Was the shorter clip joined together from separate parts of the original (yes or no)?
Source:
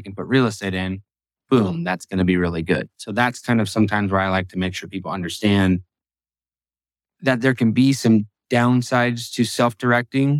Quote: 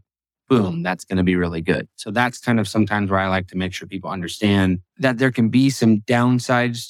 yes